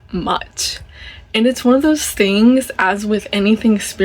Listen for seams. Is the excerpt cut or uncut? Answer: uncut